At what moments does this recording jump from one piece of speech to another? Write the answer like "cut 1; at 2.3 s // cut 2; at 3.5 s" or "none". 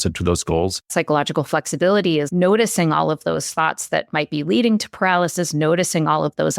cut 1; at 0.9 s // cut 2; at 2.3 s

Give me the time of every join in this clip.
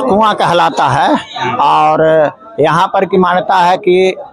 none

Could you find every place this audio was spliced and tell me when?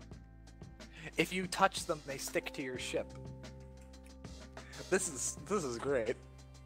cut 1; at 0.9 s

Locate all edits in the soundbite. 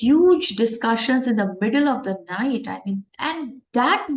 cut 1; at 3.1 s

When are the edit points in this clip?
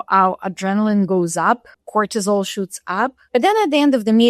cut 1; at 1.7 s // cut 2; at 3.2 s

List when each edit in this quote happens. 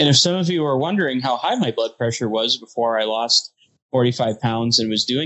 none

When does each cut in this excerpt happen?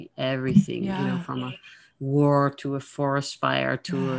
none

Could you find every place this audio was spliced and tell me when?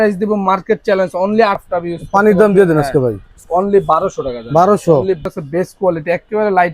cut 1; at 1.6 s // cut 2; at 5.2 s

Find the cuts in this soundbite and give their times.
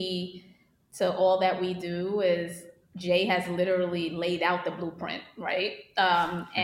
none

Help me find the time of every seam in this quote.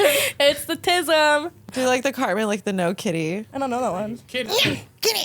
cut 1; at 1.7 s // cut 2; at 3.5 s // cut 3; at 4.5 s

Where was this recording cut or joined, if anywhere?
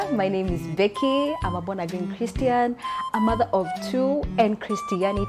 cut 1; at 4.3 s

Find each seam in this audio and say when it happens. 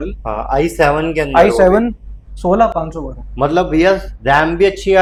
none

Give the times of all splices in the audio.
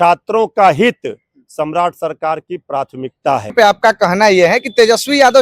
cut 1; at 3.5 s

